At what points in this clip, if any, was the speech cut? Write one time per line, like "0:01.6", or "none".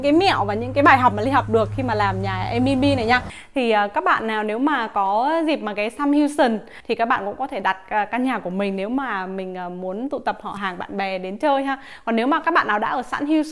0:03.4
0:06.7